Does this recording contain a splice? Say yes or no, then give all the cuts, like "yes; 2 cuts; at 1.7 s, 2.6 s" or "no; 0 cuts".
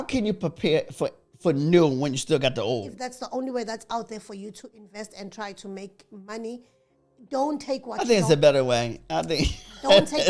yes; 1 cut; at 2.9 s